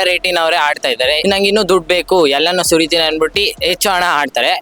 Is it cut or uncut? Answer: cut